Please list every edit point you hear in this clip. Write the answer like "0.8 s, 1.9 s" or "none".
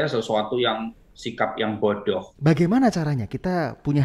2.3 s